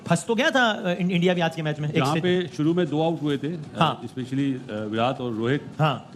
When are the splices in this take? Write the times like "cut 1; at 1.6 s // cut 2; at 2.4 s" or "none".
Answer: none

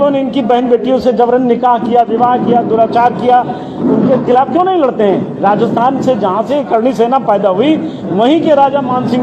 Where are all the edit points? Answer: none

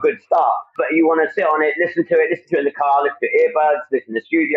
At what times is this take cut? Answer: none

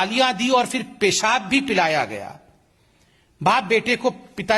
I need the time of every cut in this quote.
none

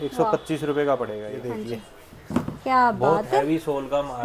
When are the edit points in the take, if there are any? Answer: cut 1; at 1.3 s

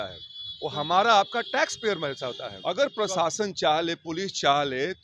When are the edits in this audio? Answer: cut 1; at 2.5 s

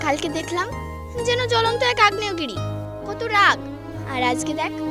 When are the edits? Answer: none

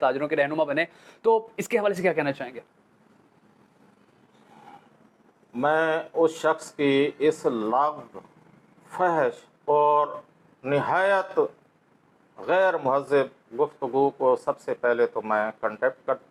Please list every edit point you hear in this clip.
none

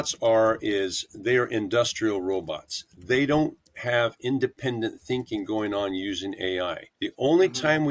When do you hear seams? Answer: cut 1; at 6.9 s

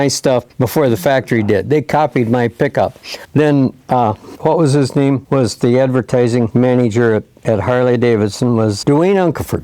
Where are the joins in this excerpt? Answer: cut 1; at 4.3 s // cut 2; at 5.2 s // cut 3; at 6.5 s // cut 4; at 8.8 s

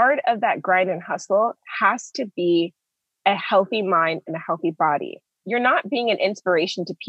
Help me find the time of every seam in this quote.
cut 1; at 5.3 s

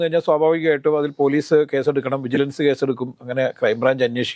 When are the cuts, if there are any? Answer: none

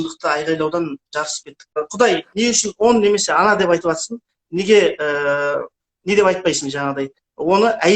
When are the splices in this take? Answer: cut 1; at 1.8 s

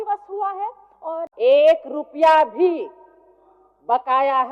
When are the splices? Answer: cut 1; at 1.3 s

